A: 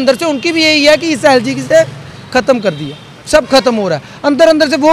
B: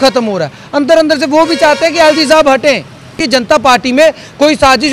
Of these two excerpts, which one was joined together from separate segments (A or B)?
B